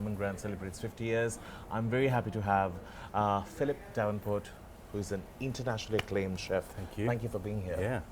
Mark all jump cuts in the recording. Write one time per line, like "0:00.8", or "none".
none

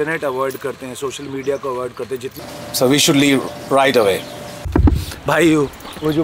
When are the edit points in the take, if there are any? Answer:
0:02.3
0:04.5

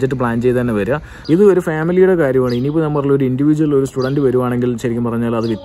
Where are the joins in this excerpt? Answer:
0:01.1

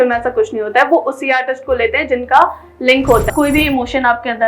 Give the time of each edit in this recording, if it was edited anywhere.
0:03.3

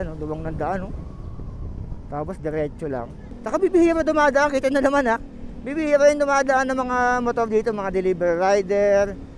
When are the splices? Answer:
0:03.2

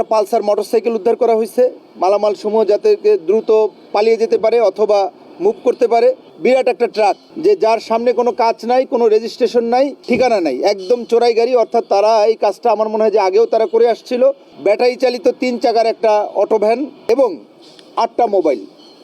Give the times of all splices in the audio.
0:06.3
0:07.3
0:10.0
0:14.5
0:17.0

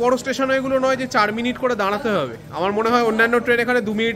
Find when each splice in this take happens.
none

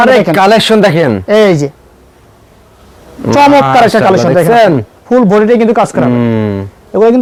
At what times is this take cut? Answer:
none

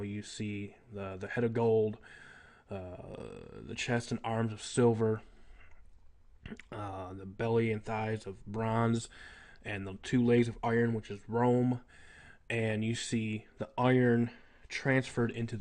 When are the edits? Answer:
0:09.9

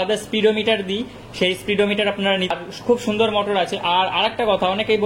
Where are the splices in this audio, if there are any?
0:02.5

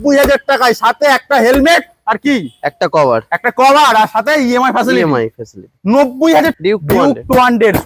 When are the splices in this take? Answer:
0:06.6

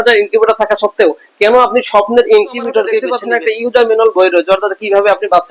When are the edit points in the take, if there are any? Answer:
0:03.1

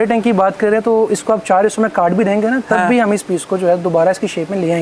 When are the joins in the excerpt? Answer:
none

